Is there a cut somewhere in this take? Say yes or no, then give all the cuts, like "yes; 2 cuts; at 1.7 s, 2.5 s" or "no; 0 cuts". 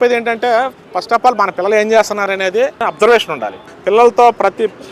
yes; 2 cuts; at 2.8 s, 3.6 s